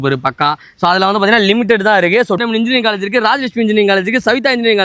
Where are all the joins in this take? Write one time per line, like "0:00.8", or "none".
0:02.4